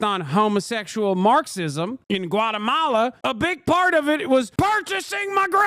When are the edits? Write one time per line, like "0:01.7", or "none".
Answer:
none

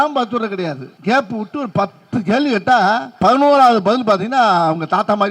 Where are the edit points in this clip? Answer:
0:00.9
0:03.1

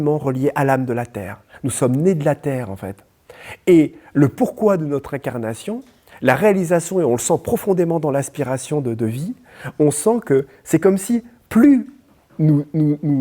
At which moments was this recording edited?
none

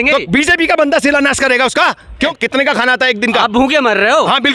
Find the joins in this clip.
0:02.3

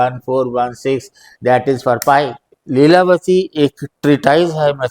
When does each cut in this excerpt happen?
0:02.4

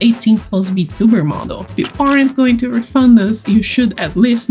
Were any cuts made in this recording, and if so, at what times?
0:01.8

